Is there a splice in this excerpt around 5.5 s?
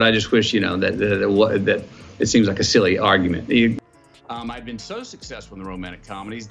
no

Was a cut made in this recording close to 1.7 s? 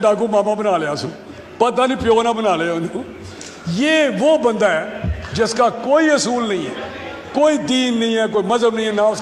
no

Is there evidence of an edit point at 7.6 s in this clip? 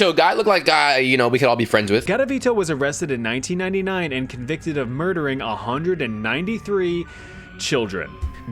no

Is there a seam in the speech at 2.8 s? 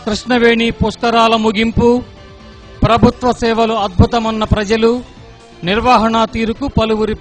no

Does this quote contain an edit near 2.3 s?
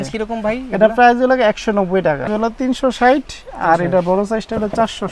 yes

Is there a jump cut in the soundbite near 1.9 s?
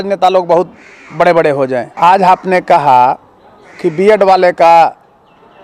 yes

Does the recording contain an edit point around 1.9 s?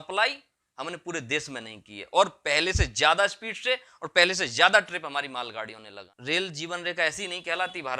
no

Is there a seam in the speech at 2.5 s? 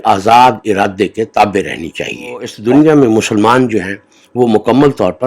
yes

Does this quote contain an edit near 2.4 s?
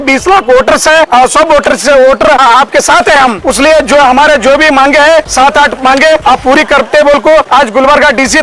yes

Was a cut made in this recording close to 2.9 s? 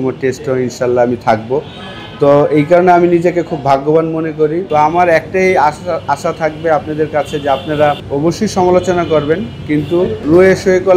no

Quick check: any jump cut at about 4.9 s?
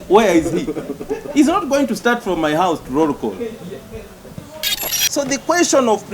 yes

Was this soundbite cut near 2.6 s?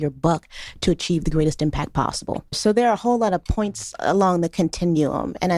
yes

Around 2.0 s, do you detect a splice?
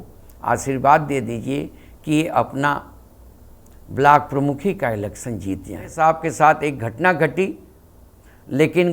no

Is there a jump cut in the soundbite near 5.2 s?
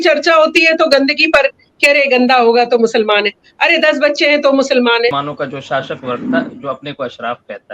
yes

